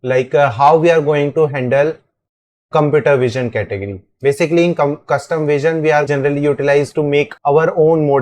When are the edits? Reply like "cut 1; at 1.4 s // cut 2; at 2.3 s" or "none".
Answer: cut 1; at 6.1 s // cut 2; at 7.3 s